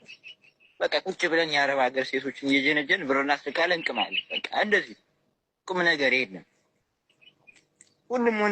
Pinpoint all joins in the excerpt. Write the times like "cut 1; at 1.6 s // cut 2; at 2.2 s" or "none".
none